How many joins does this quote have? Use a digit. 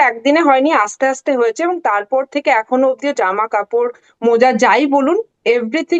0